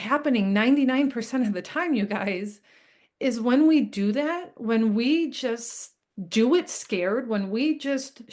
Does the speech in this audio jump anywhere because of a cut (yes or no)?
no